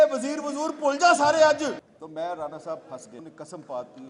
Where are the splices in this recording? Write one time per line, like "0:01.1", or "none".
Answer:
0:01.8
0:03.2